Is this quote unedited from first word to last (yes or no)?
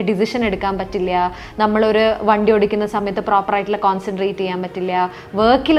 yes